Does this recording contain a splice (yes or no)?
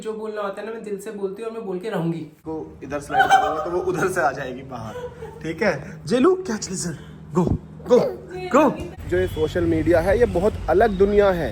yes